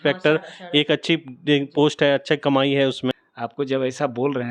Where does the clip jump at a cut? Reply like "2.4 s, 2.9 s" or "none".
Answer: 3.3 s